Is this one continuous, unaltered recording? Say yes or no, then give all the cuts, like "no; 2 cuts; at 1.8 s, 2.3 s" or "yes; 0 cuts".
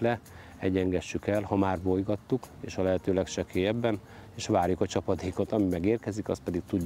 yes; 0 cuts